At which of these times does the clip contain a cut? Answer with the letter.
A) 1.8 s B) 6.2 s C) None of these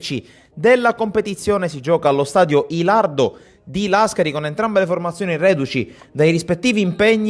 C